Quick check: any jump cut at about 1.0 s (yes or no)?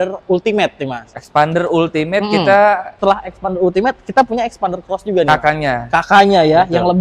no